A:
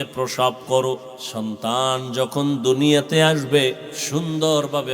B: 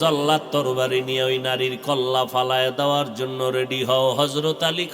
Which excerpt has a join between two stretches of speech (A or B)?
A